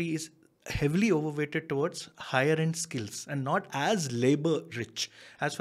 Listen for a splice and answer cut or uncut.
uncut